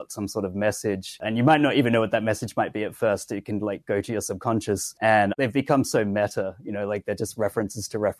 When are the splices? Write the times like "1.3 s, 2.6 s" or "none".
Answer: 1.2 s, 5.2 s